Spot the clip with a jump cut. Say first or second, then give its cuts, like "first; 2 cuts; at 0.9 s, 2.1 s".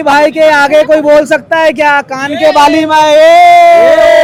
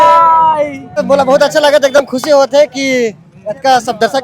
second; 1 cut; at 1.0 s